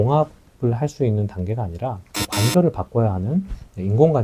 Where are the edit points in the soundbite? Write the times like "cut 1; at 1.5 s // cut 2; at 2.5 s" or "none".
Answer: none